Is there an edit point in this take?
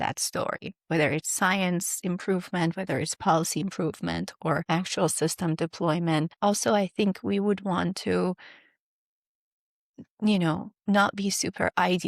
yes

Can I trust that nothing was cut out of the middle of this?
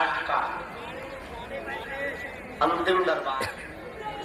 no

